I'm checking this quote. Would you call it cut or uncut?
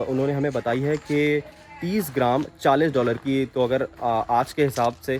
uncut